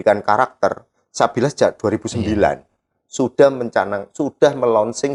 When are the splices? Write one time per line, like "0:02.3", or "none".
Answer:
none